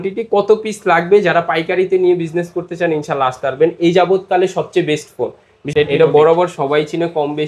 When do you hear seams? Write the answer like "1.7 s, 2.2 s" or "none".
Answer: 5.6 s